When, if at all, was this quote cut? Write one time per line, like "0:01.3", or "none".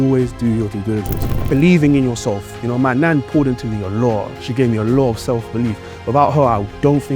0:01.3